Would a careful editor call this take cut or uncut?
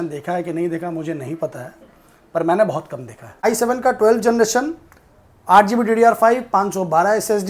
cut